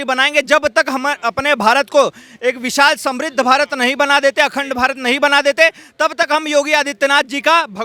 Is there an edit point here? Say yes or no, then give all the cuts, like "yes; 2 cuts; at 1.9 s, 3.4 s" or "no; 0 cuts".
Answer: no; 0 cuts